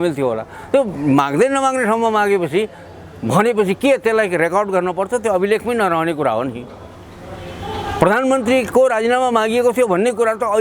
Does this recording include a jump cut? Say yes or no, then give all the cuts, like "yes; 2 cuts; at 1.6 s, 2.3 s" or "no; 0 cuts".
no; 0 cuts